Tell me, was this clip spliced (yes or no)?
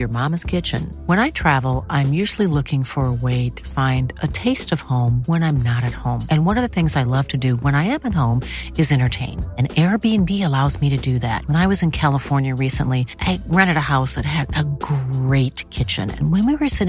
no